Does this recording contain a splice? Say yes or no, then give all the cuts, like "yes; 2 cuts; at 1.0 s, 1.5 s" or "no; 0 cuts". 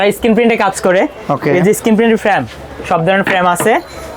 no; 0 cuts